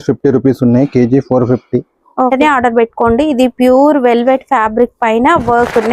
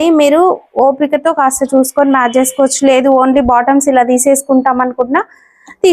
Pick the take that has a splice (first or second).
first